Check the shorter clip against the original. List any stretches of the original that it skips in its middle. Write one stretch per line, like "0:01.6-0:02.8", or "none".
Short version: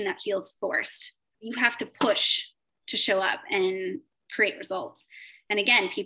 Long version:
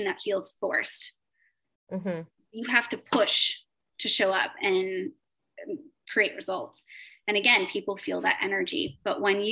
0:01.3-0:02.4
0:05.3-0:06.0